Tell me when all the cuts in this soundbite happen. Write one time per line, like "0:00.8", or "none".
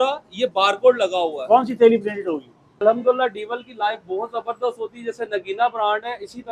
0:02.7